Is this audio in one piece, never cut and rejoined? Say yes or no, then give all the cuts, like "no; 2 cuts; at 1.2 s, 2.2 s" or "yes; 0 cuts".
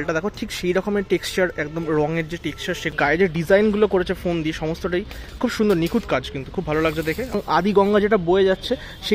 no; 2 cuts; at 3.2 s, 7.6 s